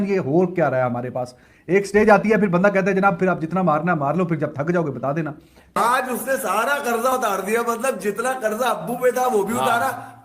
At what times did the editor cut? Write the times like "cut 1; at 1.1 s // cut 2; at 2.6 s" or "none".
cut 1; at 5.7 s